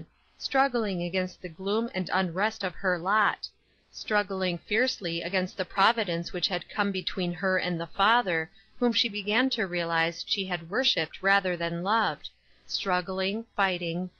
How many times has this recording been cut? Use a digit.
1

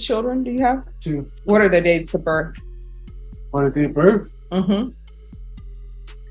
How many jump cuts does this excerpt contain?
2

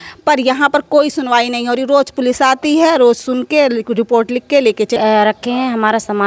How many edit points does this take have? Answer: 1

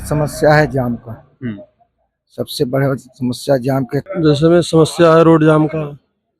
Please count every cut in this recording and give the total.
1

